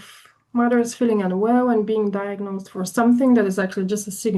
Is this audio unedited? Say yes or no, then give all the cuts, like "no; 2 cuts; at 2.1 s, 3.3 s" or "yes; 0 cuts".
yes; 0 cuts